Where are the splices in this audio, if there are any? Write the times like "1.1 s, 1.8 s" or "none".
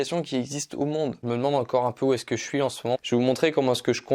1.2 s, 3.0 s